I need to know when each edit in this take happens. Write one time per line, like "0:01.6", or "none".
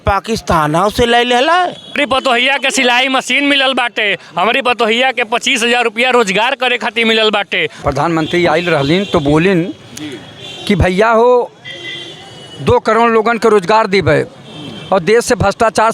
0:02.0
0:07.7